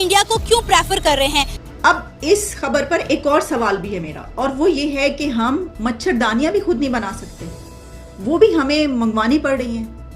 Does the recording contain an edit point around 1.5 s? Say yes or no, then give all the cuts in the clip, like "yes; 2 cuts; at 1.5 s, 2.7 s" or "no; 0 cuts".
yes; 1 cut; at 1.5 s